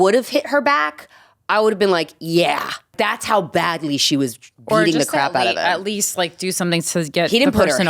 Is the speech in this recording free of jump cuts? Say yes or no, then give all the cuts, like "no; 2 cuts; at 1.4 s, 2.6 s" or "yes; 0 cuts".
no; 1 cut; at 2.9 s